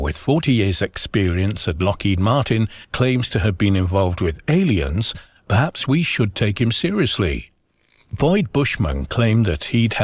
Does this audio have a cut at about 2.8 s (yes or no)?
yes